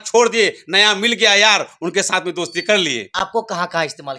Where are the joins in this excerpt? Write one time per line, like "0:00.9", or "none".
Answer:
none